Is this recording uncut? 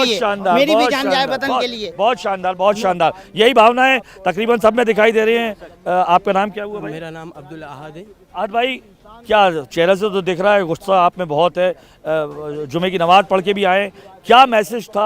yes; 0 cuts

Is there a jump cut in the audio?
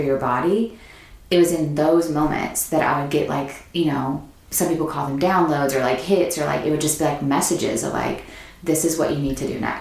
no; 0 cuts

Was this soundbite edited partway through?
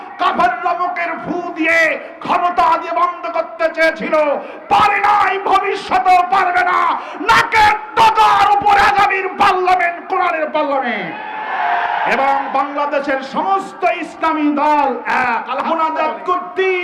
yes; 1 cut; at 15.7 s

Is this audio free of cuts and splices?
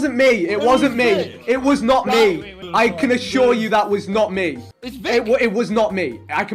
no; 1 cut; at 4.6 s

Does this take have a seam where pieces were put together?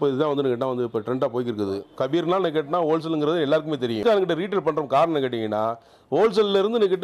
yes; 2 cuts; at 1.9 s, 4.0 s

